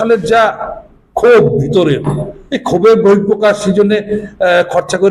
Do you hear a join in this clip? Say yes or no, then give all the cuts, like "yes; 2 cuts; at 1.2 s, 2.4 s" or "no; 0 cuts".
no; 0 cuts